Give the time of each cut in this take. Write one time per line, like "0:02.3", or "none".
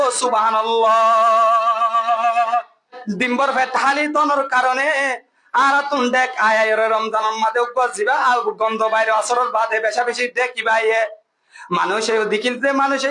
0:03.0

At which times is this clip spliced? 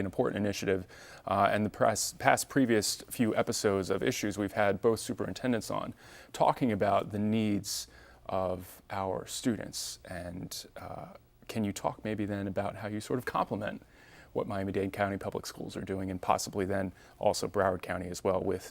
0:01.5

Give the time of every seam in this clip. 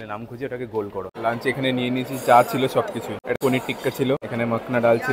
0:01.0
0:03.3
0:04.3

